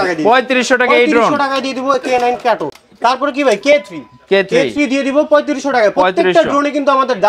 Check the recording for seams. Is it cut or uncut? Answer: uncut